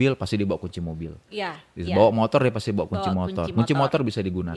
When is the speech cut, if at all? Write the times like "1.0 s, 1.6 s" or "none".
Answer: none